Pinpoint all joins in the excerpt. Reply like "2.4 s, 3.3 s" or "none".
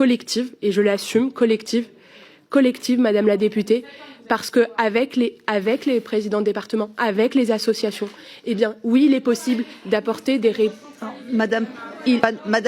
none